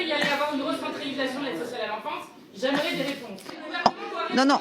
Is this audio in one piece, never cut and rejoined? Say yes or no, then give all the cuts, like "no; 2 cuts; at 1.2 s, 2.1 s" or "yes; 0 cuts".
no; 1 cut; at 3.7 s